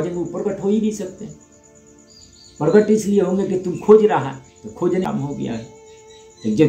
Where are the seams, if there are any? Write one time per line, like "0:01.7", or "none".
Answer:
0:05.1